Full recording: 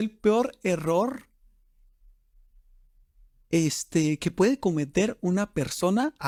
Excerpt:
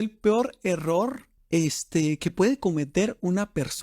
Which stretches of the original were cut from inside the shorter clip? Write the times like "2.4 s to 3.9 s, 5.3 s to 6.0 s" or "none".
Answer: 1.3 s to 3.3 s